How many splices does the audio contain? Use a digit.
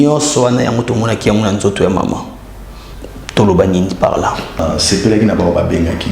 1